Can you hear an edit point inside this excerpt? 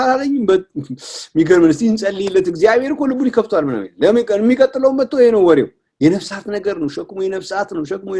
no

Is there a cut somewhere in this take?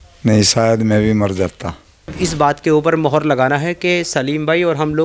yes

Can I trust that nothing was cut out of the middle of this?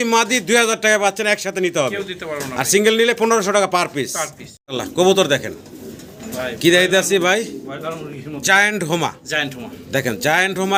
yes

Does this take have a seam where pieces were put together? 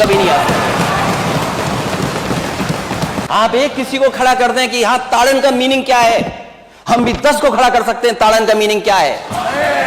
yes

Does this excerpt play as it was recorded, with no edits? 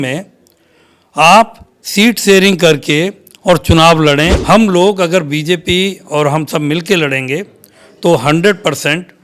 no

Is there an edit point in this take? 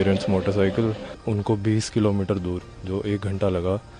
yes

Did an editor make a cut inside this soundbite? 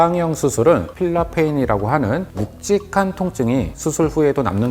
yes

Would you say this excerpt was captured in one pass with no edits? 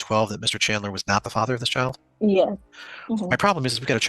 no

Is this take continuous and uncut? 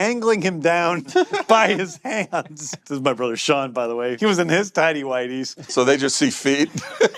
no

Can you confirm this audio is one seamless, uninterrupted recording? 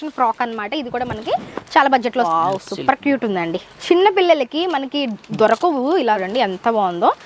no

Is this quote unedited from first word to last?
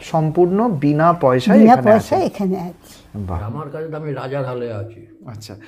no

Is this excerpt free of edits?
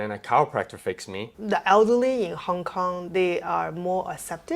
no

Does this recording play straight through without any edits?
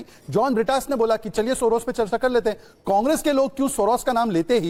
yes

